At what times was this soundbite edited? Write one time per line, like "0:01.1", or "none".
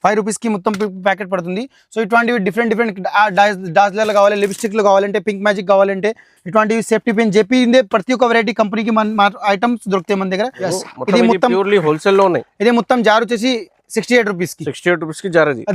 0:10.7